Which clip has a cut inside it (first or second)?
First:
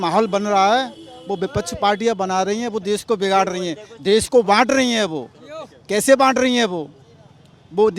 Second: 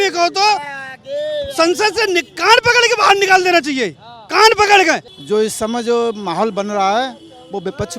second